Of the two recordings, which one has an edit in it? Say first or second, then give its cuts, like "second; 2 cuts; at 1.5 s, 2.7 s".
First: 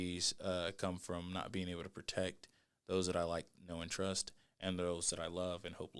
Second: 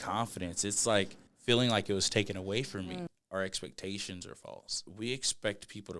second; 3 cuts; at 1.2 s, 3.1 s, 4.8 s